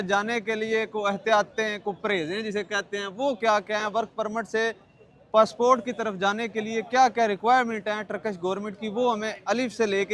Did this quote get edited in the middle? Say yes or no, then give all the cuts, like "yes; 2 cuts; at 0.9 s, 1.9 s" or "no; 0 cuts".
no; 0 cuts